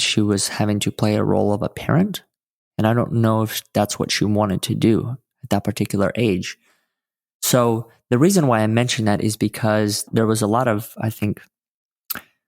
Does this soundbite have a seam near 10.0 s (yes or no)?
yes